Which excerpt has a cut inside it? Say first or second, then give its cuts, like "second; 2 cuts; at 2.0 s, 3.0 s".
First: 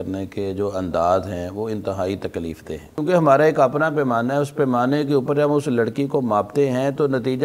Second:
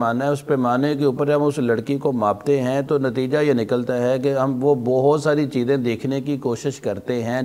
first; 1 cut; at 2.9 s